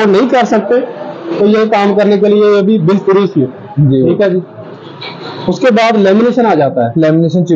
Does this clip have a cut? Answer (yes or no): no